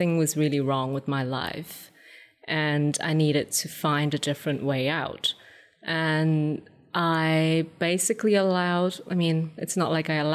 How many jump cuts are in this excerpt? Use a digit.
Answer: 0